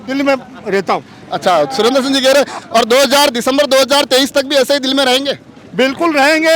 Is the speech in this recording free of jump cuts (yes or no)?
yes